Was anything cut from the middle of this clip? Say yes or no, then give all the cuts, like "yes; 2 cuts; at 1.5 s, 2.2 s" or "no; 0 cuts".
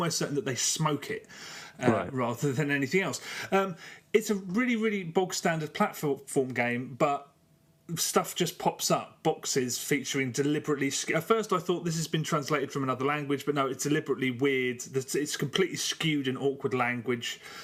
no; 0 cuts